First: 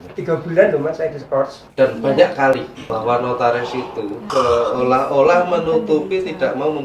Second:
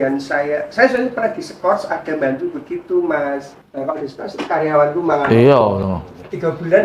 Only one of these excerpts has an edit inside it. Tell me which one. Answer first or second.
first